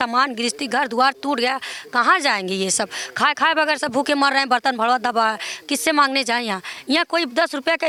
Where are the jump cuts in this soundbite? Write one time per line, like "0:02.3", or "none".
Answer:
none

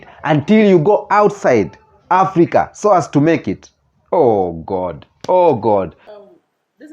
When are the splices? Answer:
0:06.0

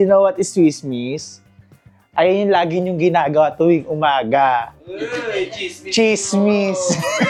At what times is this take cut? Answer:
none

